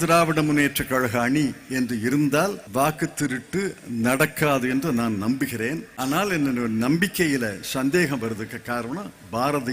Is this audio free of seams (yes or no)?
no